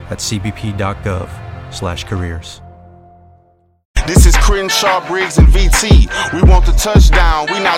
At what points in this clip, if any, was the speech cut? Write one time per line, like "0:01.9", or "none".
0:03.9